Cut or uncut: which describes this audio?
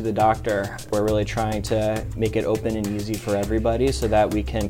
cut